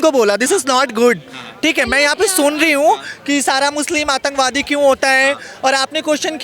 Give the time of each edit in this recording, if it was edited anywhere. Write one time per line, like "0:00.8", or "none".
none

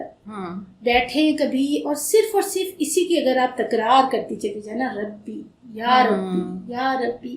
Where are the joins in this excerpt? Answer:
none

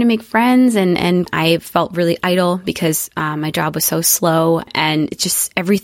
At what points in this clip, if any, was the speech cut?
0:01.2
0:04.7

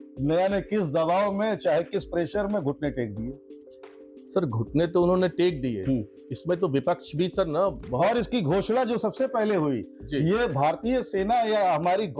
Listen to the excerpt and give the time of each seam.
none

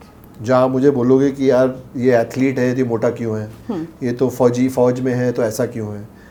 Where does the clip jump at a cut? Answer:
none

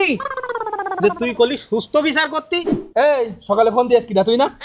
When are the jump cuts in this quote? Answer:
0:02.8

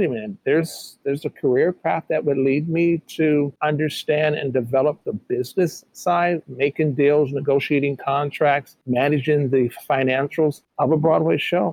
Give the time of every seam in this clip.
0:03.5
0:08.7
0:10.6

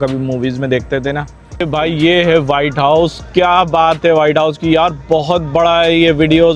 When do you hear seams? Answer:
0:01.4

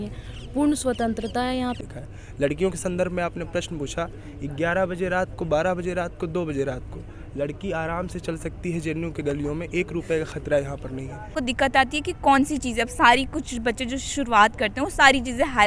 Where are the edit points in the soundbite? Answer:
0:01.8
0:11.3

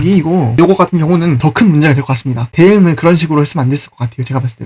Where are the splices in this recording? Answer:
0:01.4
0:02.5

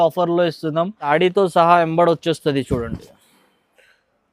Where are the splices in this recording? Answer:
0:01.1

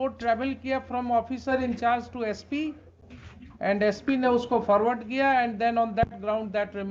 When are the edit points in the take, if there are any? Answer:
none

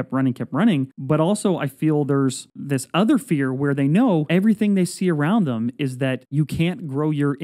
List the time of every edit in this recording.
0:00.9
0:02.5
0:04.3
0:06.2

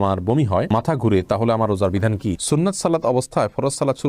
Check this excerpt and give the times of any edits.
0:02.4

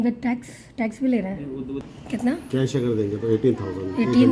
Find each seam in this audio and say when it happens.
0:01.9

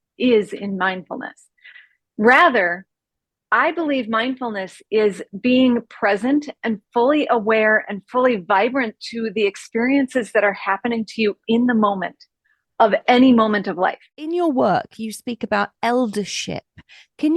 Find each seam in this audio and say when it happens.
0:14.1

